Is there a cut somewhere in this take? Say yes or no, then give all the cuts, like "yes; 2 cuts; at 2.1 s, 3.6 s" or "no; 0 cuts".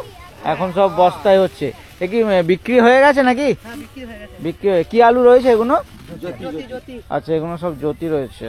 no; 0 cuts